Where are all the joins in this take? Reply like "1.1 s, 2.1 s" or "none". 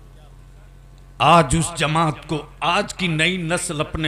none